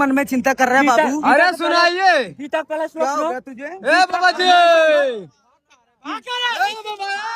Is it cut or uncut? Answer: uncut